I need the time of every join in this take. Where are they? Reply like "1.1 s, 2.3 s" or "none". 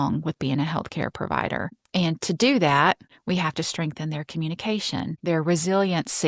1.8 s, 3.1 s, 5.2 s